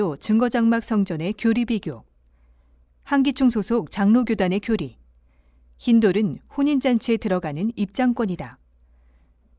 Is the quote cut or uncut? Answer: uncut